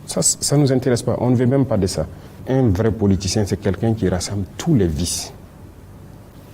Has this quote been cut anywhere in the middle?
yes; 1 cut; at 2.4 s

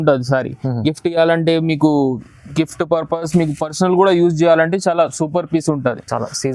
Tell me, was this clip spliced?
no; 0 cuts

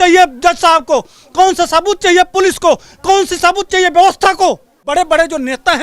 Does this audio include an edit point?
yes; 1 cut; at 4.9 s

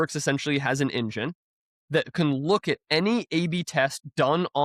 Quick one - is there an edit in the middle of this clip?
no; 0 cuts

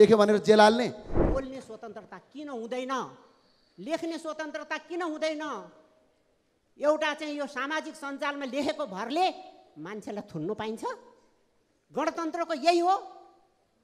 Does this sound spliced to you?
yes; 1 cut; at 1.1 s

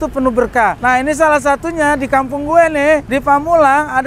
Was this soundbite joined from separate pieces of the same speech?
yes; 2 cuts; at 0.8 s, 3.1 s

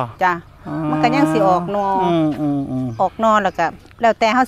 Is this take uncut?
yes; 0 cuts

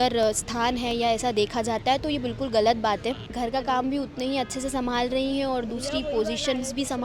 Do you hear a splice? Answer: yes; 1 cut; at 3.3 s

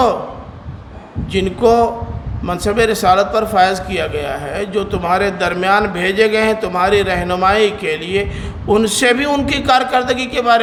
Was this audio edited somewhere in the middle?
no; 0 cuts

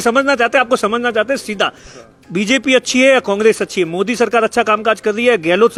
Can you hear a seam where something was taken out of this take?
no; 0 cuts

